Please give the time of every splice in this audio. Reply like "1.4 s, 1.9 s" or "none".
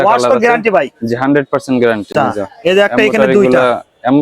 2.1 s